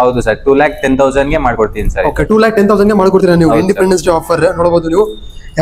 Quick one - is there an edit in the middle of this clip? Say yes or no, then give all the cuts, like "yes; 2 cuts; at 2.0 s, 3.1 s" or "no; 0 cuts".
no; 0 cuts